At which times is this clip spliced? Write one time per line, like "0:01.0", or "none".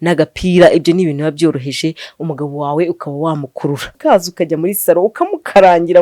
0:04.0